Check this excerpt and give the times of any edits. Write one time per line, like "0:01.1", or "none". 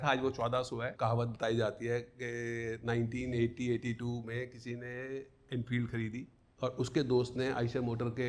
0:00.9
0:06.4